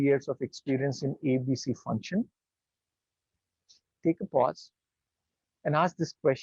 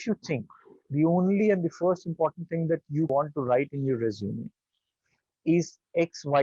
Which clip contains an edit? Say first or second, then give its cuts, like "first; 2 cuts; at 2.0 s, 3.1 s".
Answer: second; 1 cut; at 3.1 s